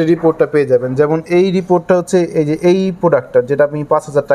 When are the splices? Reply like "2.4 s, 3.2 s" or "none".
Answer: none